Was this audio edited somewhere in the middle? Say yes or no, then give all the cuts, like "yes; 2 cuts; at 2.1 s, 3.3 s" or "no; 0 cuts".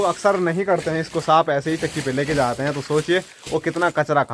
no; 0 cuts